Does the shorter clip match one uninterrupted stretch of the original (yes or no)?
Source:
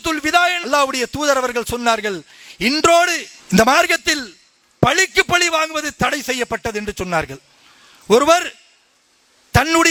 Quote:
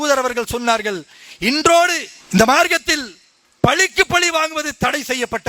yes